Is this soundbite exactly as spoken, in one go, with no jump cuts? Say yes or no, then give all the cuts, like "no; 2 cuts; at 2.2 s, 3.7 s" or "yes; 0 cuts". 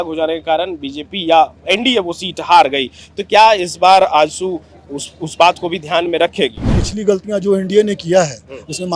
no; 1 cut; at 6.8 s